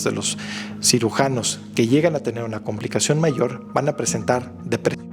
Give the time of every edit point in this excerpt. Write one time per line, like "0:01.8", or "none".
none